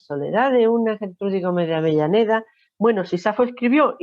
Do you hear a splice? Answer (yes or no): yes